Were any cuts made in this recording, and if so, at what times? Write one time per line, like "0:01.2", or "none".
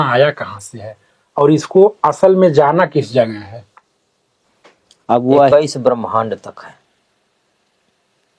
0:05.5

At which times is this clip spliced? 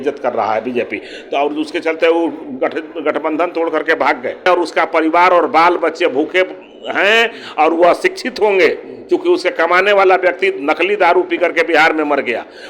0:04.5

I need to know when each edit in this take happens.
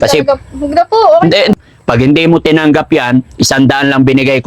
0:01.5

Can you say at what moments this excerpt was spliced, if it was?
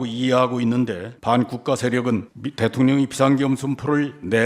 0:01.1
0:02.4

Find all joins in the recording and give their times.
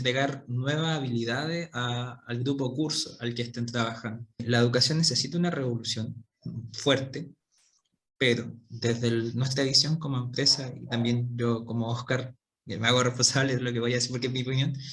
0:04.4

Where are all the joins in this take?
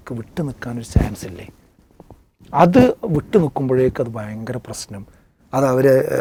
none

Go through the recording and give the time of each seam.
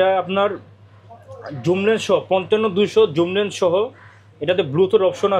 none

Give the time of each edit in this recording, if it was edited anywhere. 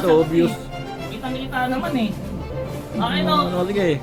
none

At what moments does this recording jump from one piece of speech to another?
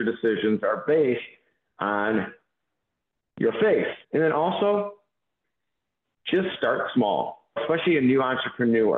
0:05.4

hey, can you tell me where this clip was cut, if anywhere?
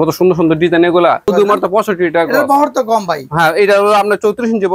0:01.3

